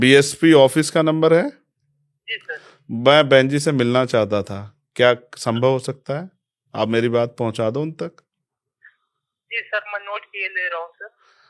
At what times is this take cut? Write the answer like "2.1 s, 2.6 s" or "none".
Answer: none

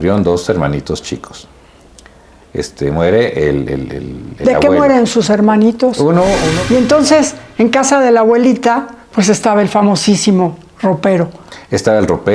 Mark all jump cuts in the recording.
6.5 s

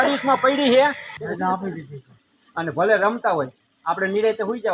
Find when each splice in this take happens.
1.1 s

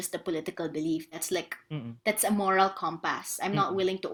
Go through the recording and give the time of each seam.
none

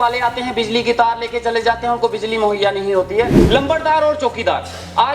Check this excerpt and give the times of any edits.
3.4 s

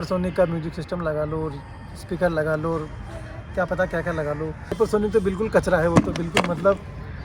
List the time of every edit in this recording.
4.6 s

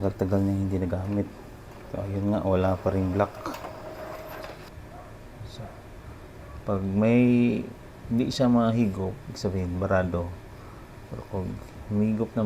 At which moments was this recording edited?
4.7 s

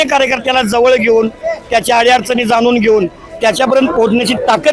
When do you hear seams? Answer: none

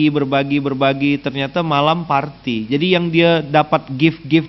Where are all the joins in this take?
none

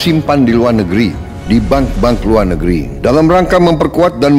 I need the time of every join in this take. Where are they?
1.3 s, 2.9 s

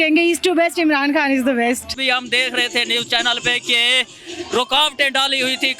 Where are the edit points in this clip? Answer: 2.0 s

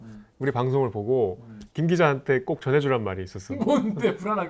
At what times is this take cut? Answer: none

